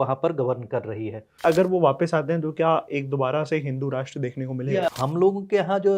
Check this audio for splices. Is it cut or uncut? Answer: cut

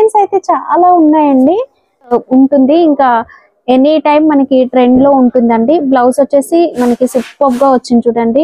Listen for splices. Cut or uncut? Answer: cut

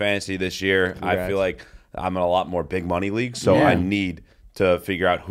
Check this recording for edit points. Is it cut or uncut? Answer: uncut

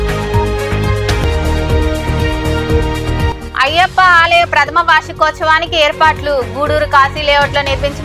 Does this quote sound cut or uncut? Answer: cut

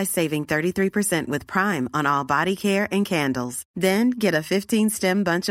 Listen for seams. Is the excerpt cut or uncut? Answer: uncut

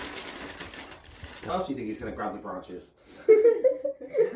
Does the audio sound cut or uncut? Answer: uncut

